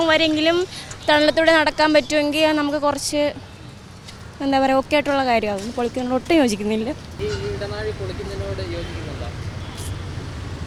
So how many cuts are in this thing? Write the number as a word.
zero